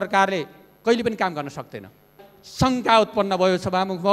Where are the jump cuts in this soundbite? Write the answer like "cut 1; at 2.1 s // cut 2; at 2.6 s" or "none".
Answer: cut 1; at 2.3 s